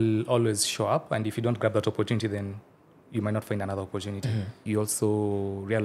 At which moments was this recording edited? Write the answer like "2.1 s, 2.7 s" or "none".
4.6 s